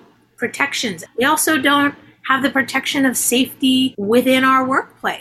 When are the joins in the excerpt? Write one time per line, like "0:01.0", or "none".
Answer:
0:01.0
0:04.0

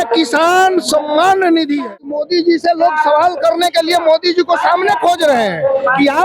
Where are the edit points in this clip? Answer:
0:02.1

